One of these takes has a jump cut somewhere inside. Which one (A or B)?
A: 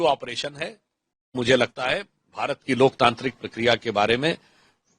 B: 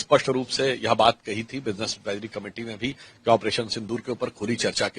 A